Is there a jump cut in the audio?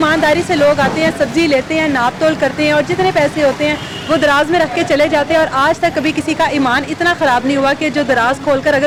no; 0 cuts

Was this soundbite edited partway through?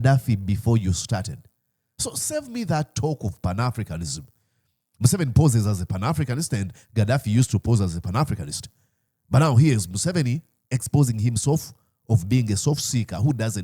no; 0 cuts

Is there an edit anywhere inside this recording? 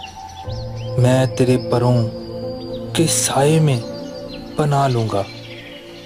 no; 0 cuts

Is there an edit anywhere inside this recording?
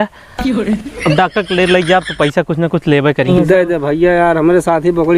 yes; 1 cut; at 3.3 s

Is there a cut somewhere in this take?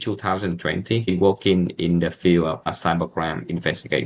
yes; 2 cuts; at 1.1 s, 2.7 s

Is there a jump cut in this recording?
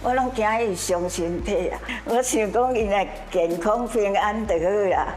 yes; 1 cut; at 1.9 s

